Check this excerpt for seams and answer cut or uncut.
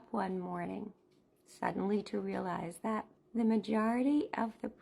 cut